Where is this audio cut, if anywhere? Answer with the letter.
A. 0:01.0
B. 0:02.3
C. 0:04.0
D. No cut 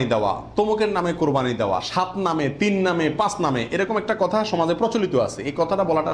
D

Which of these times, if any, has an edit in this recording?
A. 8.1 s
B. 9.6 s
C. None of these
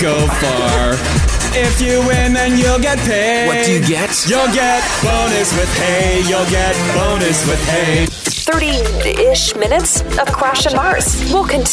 A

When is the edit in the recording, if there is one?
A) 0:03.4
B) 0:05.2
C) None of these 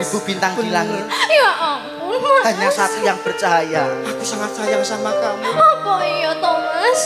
C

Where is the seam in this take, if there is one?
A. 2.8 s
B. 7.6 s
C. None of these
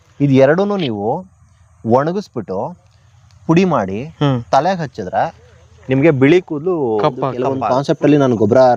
B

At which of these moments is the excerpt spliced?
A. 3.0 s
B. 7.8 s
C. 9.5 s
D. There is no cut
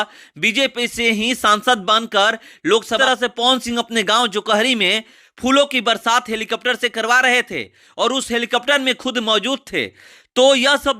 A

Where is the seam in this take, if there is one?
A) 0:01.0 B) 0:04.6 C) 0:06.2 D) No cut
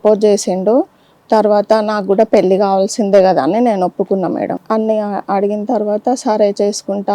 B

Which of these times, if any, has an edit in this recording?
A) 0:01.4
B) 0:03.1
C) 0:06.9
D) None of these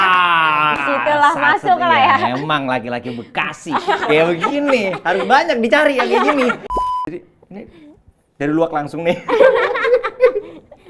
C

